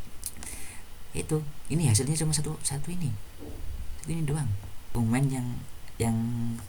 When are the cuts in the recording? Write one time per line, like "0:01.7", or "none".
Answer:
0:04.9